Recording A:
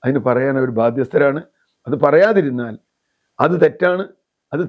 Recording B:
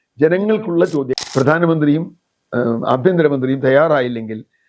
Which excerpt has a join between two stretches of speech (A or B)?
B